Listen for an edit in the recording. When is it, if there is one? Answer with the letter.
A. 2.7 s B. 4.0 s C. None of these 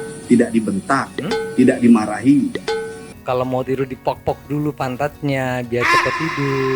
A